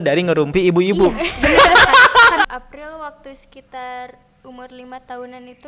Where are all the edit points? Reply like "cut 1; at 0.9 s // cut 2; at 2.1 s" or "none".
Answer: cut 1; at 2.5 s